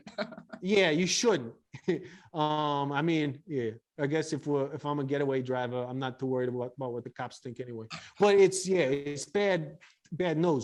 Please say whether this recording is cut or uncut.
uncut